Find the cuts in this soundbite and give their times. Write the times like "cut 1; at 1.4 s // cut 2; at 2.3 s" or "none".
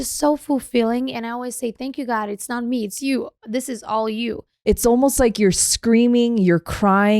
cut 1; at 4.5 s

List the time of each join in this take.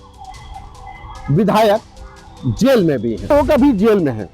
cut 1; at 3.3 s

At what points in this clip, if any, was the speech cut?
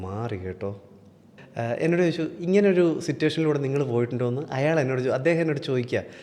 cut 1; at 1.4 s

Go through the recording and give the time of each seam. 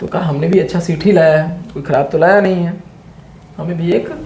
none

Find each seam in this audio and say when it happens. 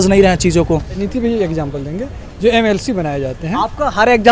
cut 1; at 1.1 s

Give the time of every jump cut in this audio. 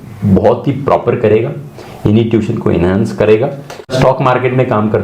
cut 1; at 3.9 s

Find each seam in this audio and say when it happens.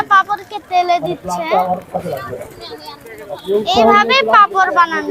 none

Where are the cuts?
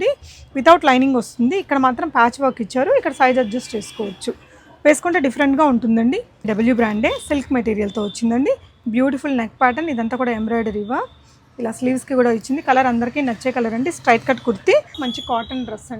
cut 1; at 6.4 s // cut 2; at 15.0 s

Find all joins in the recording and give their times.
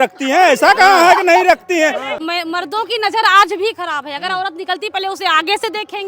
cut 1; at 2.1 s

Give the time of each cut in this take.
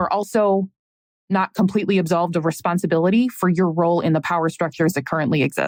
none

